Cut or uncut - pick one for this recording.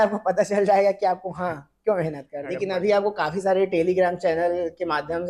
cut